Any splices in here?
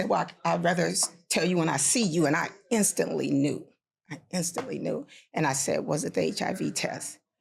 no; 0 cuts

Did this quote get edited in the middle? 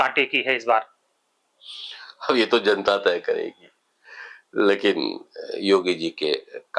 no; 0 cuts

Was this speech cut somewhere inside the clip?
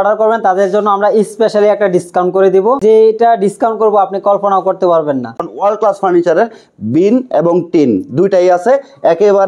yes; 2 cuts; at 2.8 s, 5.4 s

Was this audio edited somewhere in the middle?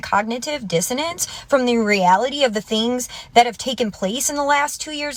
no; 0 cuts

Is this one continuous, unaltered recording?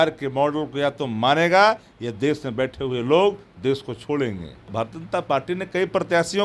no; 1 cut; at 4.7 s

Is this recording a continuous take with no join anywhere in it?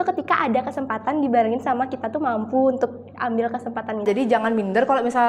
no; 1 cut; at 4.0 s

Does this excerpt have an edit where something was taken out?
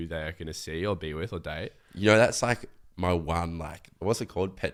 no; 0 cuts

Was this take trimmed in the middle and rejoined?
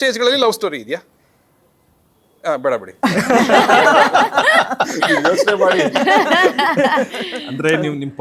no; 0 cuts

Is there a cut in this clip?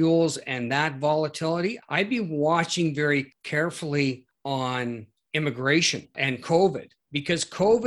yes; 5 cuts; at 1.8 s, 3.4 s, 4.3 s, 5.1 s, 6.1 s

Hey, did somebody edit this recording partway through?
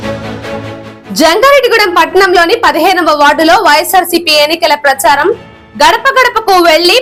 no; 0 cuts

